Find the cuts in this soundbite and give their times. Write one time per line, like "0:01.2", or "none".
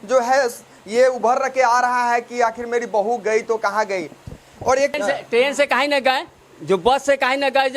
0:05.0